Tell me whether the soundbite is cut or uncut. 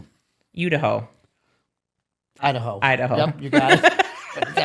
uncut